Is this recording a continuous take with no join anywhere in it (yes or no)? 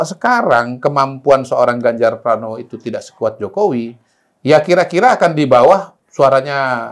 yes